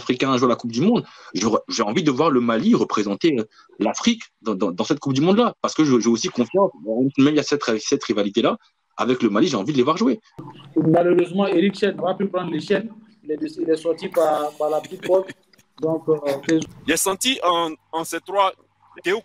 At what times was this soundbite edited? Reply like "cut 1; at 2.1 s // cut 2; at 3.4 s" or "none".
cut 1; at 10.5 s // cut 2; at 16.6 s